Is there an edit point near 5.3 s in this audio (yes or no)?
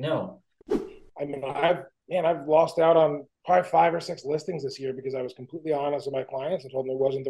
no